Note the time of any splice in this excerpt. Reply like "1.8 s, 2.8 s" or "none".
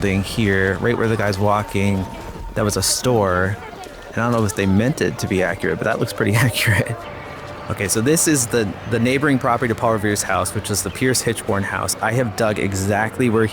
7.7 s